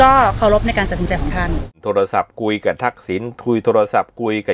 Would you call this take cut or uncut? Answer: cut